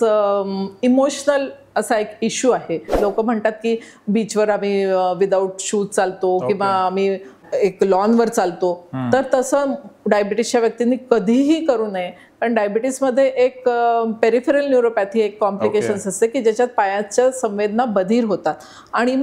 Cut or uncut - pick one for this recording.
cut